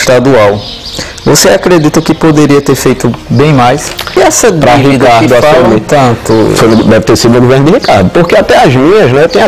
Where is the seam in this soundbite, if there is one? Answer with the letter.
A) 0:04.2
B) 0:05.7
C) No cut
A